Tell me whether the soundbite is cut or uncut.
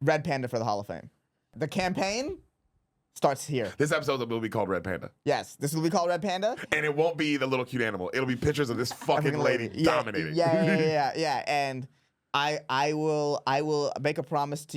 cut